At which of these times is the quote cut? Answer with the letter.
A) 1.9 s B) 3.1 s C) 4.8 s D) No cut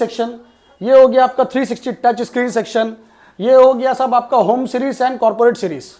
D